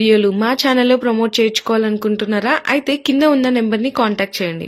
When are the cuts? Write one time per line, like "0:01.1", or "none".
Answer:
none